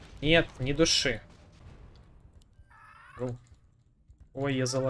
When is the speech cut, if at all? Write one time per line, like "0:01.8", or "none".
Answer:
0:01.6

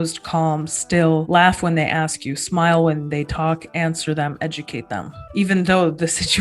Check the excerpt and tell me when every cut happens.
0:01.3
0:05.3

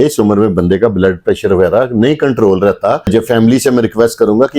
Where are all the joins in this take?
0:03.1

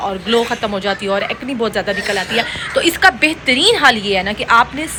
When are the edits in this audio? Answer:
none

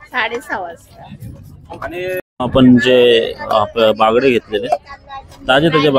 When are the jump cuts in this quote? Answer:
0:02.2

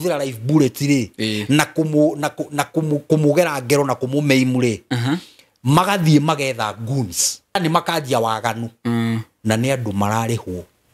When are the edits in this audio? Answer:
0:07.6

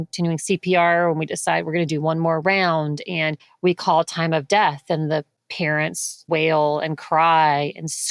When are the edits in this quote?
none

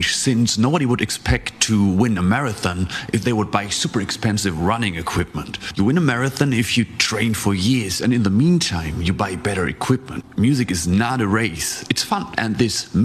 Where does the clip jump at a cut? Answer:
0:10.2

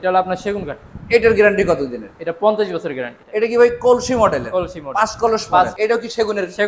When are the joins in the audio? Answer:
0:03.1
0:05.7

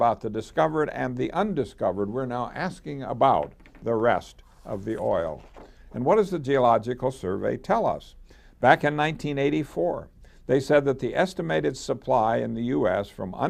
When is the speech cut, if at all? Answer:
0:06.4

